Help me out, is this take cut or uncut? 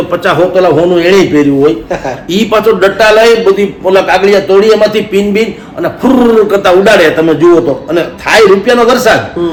uncut